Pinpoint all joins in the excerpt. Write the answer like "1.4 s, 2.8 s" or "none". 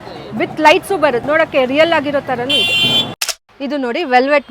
1.2 s, 3.2 s